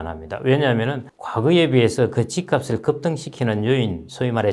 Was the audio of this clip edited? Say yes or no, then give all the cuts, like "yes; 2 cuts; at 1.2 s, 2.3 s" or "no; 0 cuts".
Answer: no; 0 cuts